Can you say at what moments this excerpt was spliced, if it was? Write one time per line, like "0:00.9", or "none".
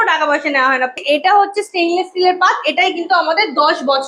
0:01.0